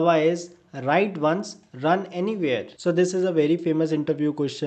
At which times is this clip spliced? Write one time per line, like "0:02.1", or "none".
0:02.7